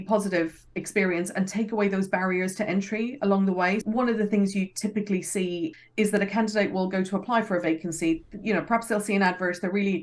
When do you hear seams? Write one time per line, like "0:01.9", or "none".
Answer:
0:03.8
0:05.7